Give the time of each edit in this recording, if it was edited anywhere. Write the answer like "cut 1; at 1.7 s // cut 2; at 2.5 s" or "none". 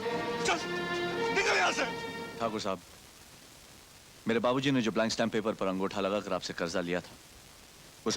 cut 1; at 2.2 s